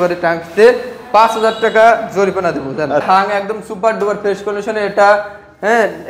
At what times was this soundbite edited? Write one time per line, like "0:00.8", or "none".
0:03.0